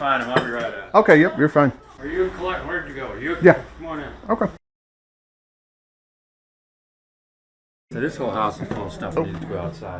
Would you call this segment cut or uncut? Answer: cut